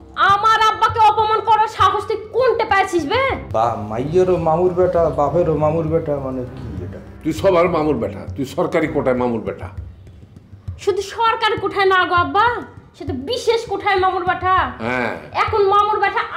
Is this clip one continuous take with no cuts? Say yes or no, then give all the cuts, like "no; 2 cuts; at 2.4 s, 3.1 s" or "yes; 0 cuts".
no; 1 cut; at 3.4 s